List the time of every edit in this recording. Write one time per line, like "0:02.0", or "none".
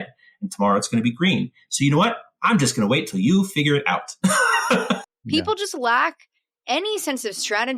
0:05.1